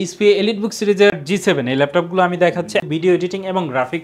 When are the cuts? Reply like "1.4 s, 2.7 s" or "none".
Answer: 1.1 s, 2.9 s